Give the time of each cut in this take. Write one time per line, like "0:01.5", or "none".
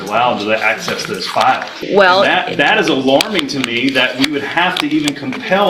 0:01.8

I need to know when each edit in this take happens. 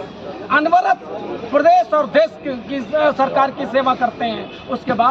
none

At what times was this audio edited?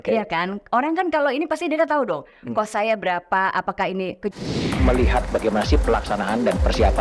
0:04.3

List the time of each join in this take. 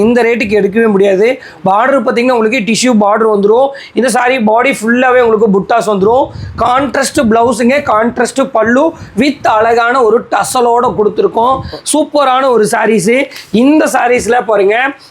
none

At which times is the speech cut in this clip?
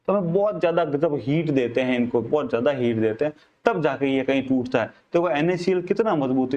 none

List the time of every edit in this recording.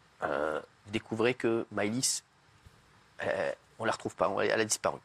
none

